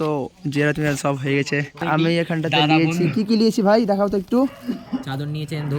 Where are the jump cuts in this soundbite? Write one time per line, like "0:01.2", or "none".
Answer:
0:01.8

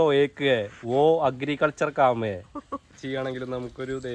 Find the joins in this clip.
0:03.0

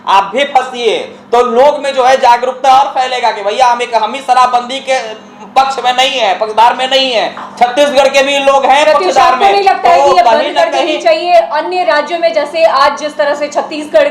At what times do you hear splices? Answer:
none

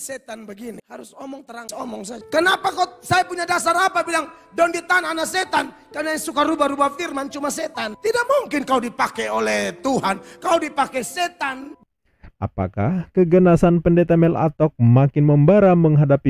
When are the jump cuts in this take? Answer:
0:11.7

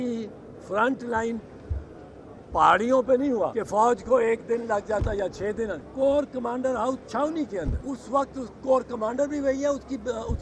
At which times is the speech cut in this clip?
0:03.6
0:05.8
0:07.8

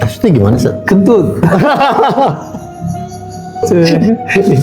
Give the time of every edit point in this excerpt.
0:03.6

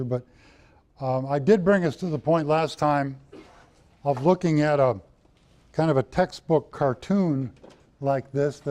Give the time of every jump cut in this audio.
none

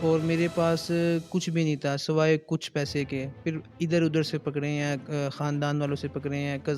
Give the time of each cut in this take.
none

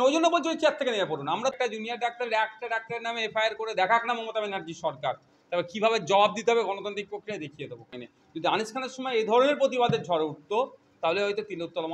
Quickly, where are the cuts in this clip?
0:01.5
0:07.9

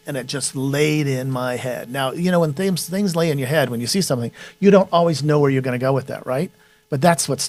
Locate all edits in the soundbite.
none

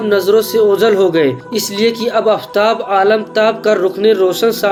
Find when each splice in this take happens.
none

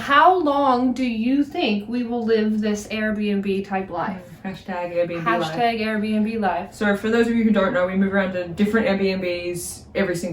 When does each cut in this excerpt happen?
none

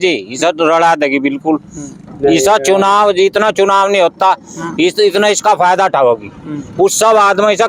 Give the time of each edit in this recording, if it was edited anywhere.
none

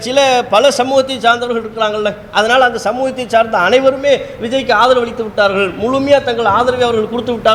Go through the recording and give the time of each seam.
none

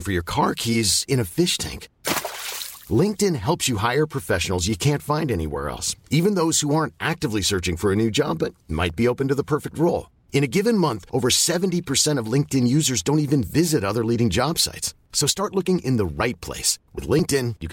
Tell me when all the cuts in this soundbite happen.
none

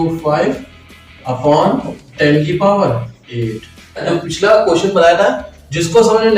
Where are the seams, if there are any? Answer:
0:04.1

